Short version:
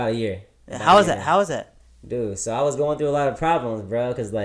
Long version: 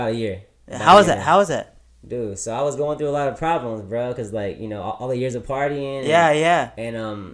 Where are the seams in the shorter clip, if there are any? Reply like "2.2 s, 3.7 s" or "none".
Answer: none

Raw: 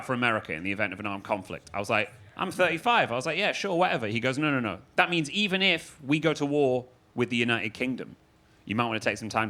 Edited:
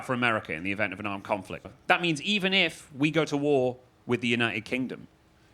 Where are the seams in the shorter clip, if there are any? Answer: 1.7 s

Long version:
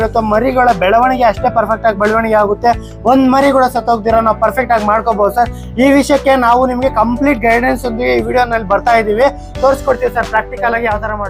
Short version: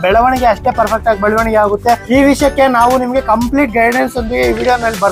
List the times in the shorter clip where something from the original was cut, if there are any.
2.0 s

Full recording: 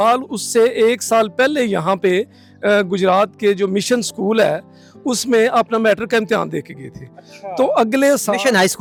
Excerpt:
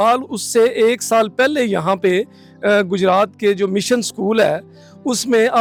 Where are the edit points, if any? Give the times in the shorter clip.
none

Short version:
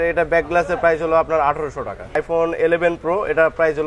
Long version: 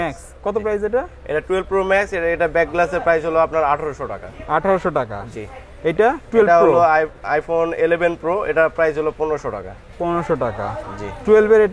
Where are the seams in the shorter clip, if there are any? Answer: 2.0 s

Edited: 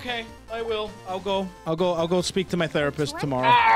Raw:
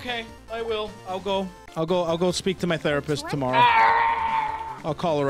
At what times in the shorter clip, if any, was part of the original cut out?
1.6 s

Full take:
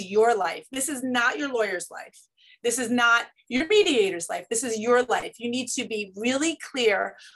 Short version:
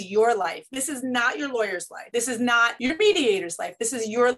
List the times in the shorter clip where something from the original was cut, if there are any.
1.9 s, 2.7 s

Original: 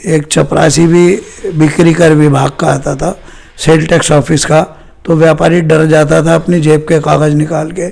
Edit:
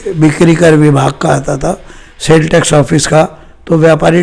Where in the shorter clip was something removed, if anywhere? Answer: none

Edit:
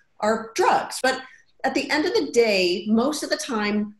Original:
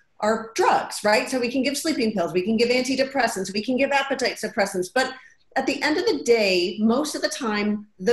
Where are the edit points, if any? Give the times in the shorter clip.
1.0 s

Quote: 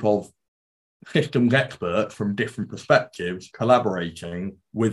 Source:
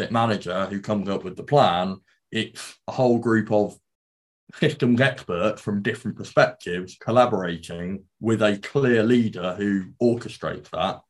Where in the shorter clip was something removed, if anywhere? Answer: none

